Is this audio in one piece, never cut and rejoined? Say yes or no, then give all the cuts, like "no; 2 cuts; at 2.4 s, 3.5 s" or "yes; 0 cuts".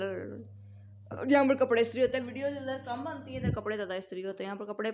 yes; 0 cuts